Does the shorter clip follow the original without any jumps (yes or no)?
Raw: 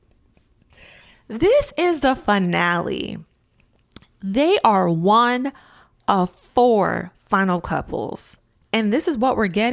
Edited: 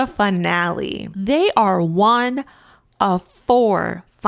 no